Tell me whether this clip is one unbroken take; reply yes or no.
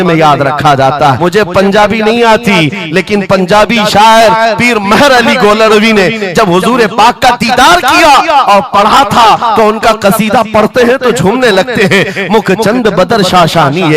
no